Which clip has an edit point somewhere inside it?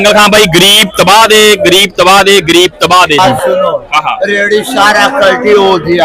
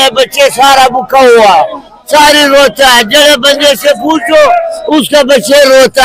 first; 1 cut; at 3.3 s

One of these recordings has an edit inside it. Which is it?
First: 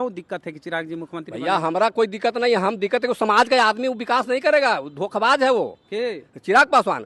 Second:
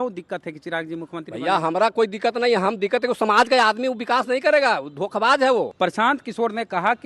second; 1 cut; at 5.7 s

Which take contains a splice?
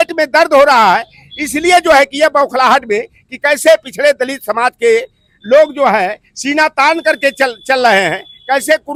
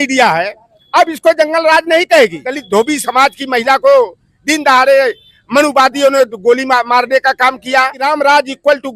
second; 2 cuts; at 2.5 s, 8.0 s

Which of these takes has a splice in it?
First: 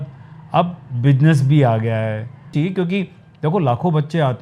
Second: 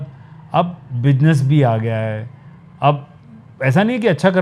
first; 1 cut; at 2.5 s

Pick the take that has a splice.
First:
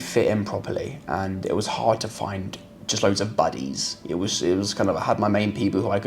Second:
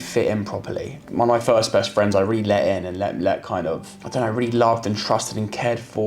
second; 1 cut; at 1.0 s

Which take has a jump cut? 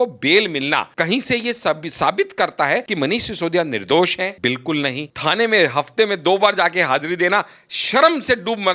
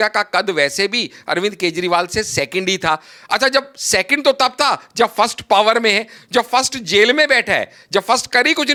first; 4 cuts; at 0.9 s, 2.9 s, 4.4 s, 5.1 s

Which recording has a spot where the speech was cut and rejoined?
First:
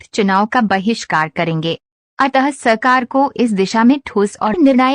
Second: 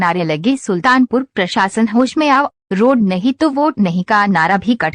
second; 1 cut; at 3.7 s

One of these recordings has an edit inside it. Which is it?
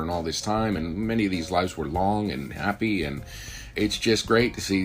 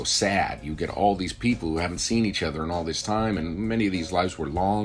first; 1 cut; at 3.7 s

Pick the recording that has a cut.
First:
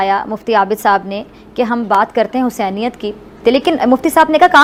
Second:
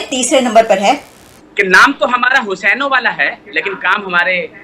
second; 1 cut; at 1.1 s

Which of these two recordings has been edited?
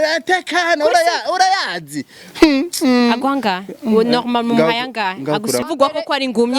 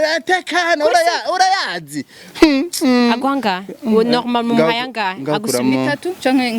first; 1 cut; at 5.6 s

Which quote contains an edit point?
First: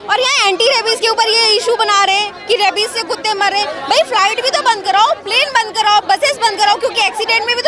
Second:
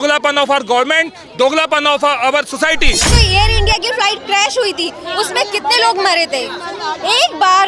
second; 1 cut; at 3.1 s

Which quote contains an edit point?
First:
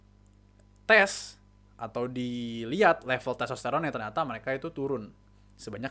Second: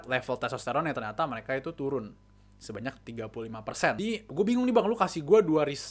second; 1 cut; at 4.0 s

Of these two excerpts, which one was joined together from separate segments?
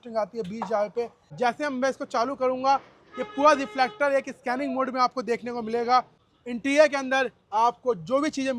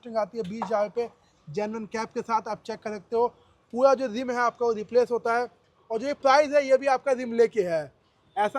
first; 2 cuts; at 1.2 s, 6.2 s

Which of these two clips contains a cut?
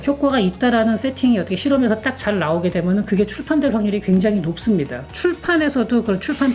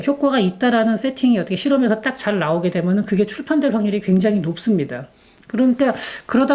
first; 1 cut; at 5.0 s

